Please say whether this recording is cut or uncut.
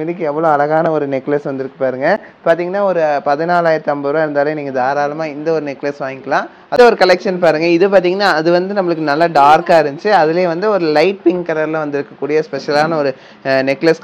uncut